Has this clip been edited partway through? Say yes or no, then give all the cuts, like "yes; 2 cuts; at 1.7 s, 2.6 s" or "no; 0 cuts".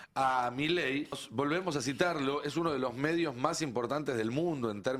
yes; 1 cut; at 1.2 s